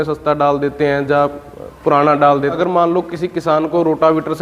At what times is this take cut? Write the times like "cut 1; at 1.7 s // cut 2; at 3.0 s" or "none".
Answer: cut 1; at 2.6 s